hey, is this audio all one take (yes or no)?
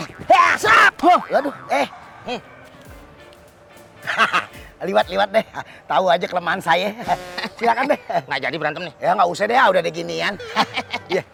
yes